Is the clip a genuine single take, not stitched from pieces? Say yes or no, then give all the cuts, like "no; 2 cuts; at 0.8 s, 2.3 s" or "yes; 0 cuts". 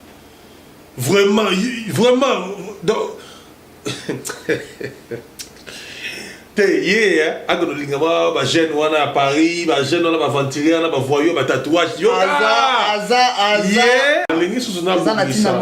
no; 1 cut; at 14.3 s